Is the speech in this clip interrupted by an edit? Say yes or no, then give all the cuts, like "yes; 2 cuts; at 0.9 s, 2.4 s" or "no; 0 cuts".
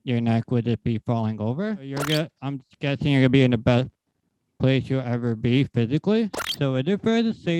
yes; 2 cuts; at 2.0 s, 6.4 s